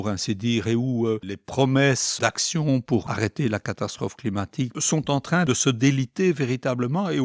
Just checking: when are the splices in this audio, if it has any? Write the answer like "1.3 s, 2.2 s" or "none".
1.3 s, 2.1 s, 3.0 s, 4.8 s, 5.5 s

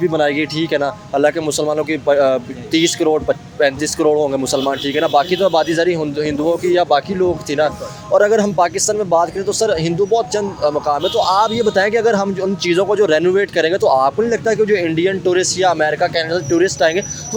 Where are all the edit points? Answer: none

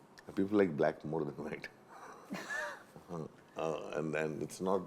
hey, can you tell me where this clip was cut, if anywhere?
none

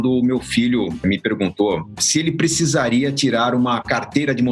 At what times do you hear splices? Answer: 1.0 s, 1.9 s

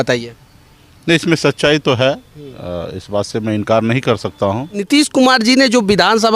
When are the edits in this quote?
4.7 s

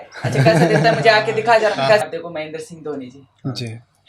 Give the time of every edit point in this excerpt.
2.0 s

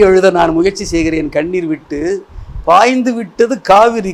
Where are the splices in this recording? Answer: none

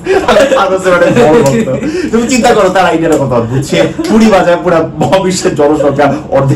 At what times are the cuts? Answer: none

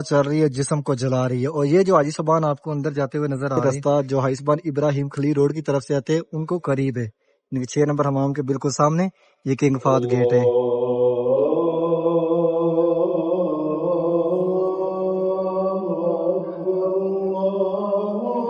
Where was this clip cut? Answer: 3.6 s

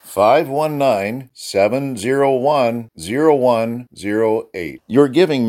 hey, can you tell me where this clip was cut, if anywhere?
none

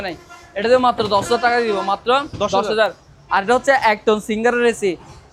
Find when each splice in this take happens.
none

